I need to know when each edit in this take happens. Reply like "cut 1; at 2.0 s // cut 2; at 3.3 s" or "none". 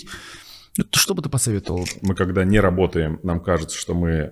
cut 1; at 1.9 s